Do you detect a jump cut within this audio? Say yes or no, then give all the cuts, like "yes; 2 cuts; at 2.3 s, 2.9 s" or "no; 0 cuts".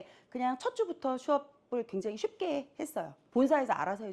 yes; 1 cut; at 3.2 s